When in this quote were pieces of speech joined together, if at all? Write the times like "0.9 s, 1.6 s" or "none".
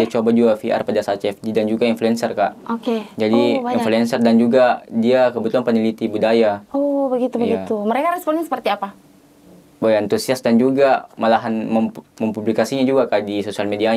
none